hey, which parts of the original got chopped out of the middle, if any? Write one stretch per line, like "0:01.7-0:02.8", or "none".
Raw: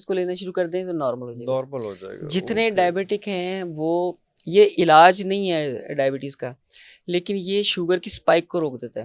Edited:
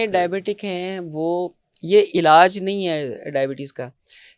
none